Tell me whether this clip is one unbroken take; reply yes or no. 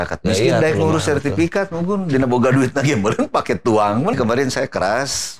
no